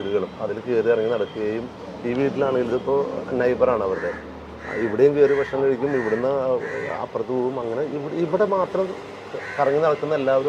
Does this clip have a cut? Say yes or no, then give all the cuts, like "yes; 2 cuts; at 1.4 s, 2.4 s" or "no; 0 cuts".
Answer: no; 0 cuts